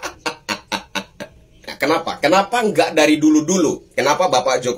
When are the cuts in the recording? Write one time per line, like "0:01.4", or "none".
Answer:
0:01.5